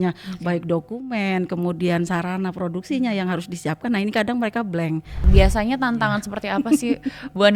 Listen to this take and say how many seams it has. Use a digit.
1